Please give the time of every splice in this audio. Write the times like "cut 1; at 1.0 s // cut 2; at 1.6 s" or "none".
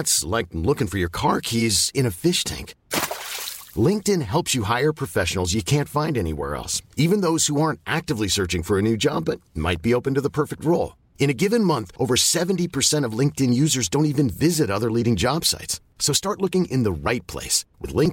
none